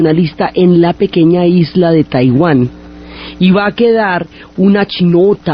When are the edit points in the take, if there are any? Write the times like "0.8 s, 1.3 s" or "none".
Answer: none